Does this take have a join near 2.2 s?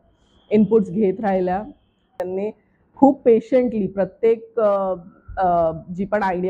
yes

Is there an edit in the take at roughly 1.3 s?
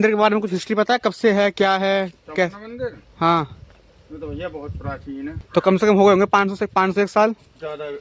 no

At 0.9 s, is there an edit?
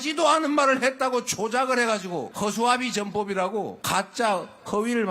no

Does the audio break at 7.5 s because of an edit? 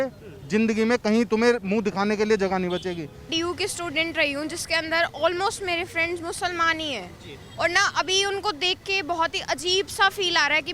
no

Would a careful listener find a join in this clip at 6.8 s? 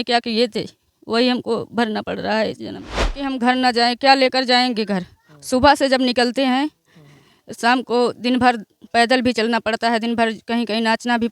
no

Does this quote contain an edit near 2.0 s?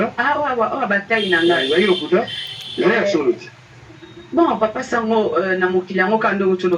no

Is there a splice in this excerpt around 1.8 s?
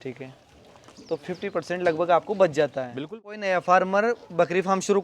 no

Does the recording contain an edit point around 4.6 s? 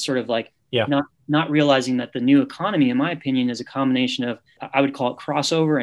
yes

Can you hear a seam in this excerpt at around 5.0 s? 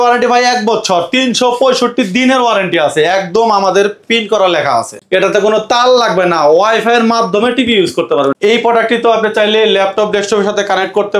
yes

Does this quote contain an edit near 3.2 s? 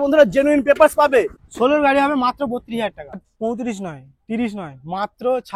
yes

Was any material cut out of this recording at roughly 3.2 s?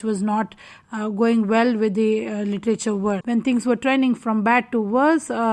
yes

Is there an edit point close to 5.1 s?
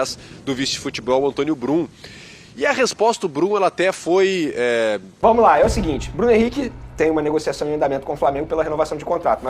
yes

